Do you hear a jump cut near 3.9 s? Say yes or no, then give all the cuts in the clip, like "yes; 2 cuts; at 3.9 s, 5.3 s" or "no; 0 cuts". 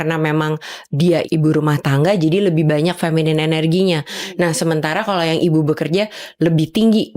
no; 1 cut; at 1.2 s